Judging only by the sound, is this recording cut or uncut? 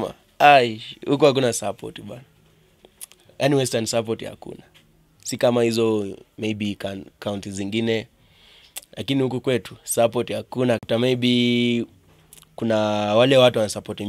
cut